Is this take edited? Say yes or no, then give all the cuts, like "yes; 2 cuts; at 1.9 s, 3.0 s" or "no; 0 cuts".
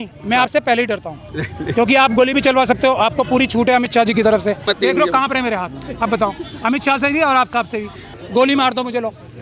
yes; 2 cuts; at 4.7 s, 8.0 s